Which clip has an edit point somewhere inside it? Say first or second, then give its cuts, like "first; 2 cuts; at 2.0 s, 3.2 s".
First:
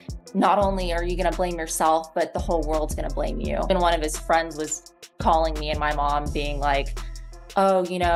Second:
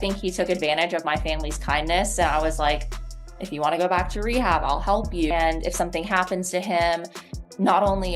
second; 1 cut; at 5.3 s